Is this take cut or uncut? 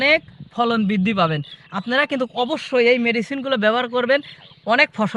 uncut